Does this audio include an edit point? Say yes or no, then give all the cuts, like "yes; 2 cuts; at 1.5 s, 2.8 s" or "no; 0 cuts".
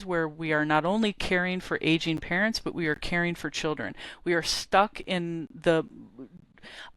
no; 0 cuts